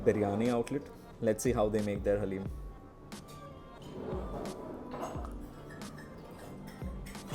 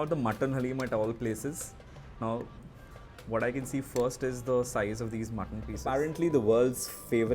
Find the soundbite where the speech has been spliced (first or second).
second